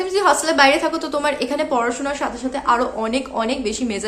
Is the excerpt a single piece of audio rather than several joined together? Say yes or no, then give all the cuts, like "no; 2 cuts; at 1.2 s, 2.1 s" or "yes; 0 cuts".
yes; 0 cuts